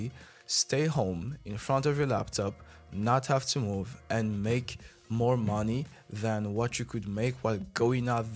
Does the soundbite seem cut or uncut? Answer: uncut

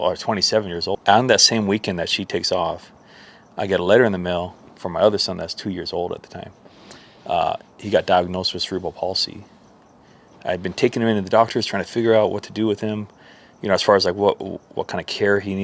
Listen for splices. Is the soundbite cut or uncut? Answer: cut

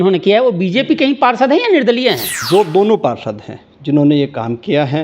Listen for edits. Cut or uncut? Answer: cut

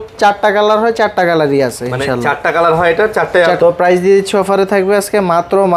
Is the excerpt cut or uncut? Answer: cut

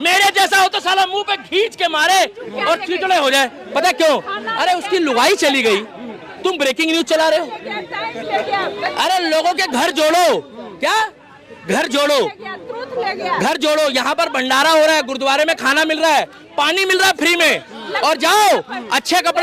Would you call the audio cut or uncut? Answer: uncut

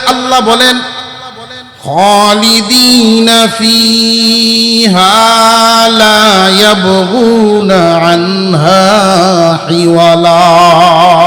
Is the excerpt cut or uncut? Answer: uncut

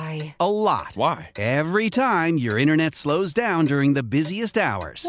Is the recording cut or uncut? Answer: uncut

